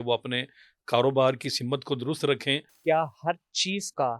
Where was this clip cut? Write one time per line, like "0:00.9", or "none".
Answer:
0:02.7